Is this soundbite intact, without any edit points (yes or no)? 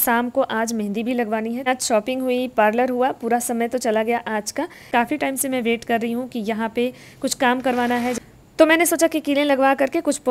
no